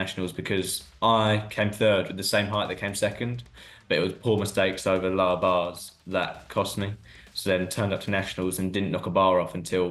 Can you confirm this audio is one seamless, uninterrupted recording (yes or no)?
yes